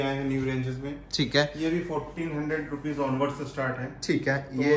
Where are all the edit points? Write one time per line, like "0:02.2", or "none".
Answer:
none